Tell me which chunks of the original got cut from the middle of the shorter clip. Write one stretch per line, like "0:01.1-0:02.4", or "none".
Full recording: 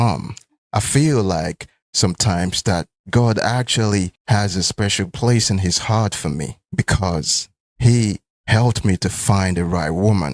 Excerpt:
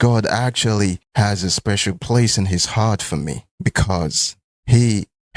none